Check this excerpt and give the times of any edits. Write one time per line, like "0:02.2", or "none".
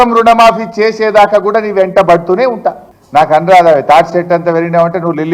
0:02.9